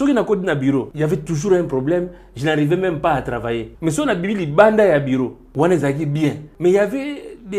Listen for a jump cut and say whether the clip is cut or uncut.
cut